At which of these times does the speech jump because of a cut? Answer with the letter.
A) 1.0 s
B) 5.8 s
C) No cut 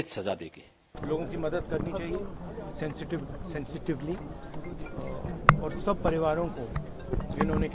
A